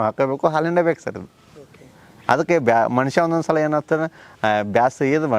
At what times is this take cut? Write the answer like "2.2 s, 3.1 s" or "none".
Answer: none